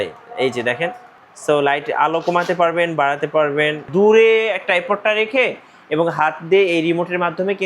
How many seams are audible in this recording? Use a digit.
1